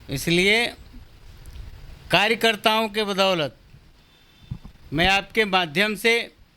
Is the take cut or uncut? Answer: uncut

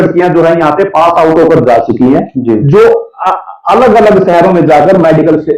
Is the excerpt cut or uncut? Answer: uncut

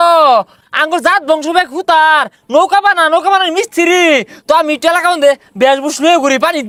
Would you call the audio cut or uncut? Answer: uncut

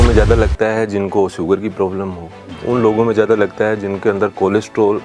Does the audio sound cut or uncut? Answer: uncut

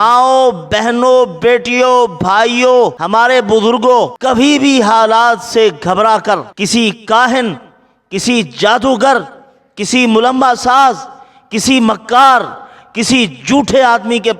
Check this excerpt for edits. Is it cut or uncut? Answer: cut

